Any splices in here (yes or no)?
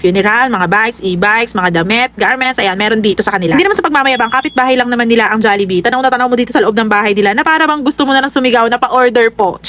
no